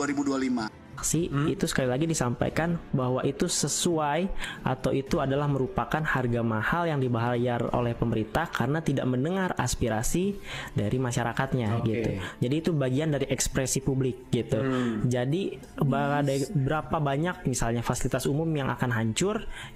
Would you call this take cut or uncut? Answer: cut